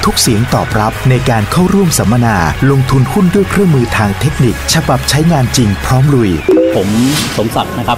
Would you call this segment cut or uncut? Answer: uncut